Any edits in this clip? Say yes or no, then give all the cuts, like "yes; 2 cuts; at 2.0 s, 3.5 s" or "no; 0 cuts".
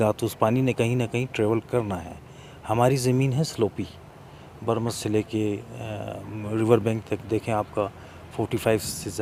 no; 0 cuts